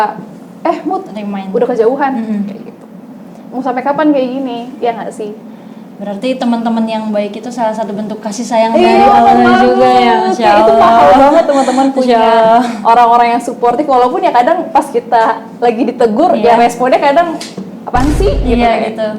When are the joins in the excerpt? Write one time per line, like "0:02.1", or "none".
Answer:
none